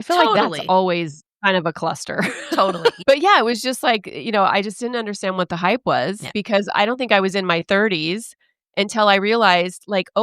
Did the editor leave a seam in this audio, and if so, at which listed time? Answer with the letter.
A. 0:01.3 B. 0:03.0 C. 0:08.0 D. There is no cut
B